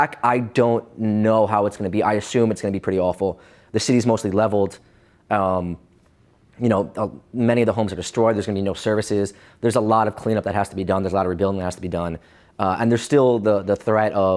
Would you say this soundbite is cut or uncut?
uncut